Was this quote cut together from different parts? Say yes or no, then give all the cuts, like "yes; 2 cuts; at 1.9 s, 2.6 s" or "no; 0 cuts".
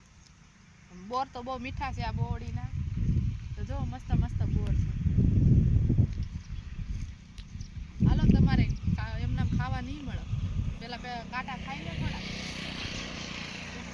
no; 0 cuts